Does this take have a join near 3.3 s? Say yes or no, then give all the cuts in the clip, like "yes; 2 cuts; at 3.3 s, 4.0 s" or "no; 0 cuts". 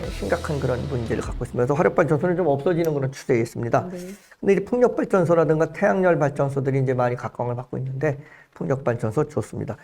no; 0 cuts